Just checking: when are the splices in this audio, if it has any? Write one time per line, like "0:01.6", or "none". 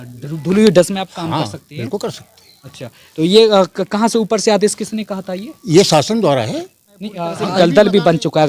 0:07.5